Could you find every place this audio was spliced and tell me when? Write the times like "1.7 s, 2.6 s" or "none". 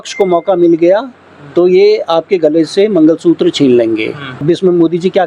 4.3 s

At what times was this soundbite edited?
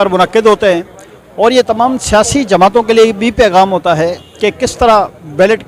none

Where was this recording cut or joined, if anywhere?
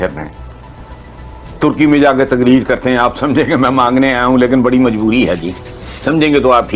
none

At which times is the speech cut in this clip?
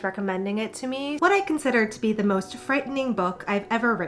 1.1 s

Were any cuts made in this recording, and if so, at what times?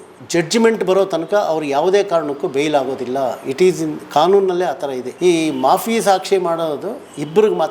5.0 s

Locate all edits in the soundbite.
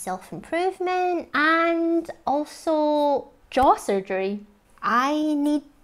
1.3 s

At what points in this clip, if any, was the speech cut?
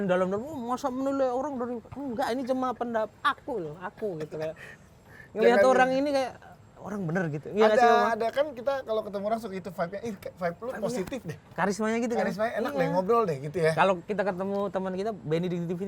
none

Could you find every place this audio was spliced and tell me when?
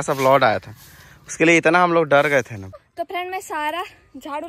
2.6 s

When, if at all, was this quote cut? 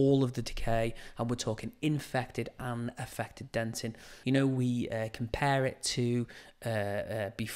4.1 s

